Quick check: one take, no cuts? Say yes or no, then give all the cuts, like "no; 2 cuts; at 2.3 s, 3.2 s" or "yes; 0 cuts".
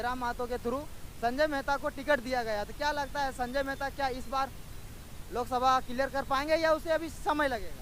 yes; 0 cuts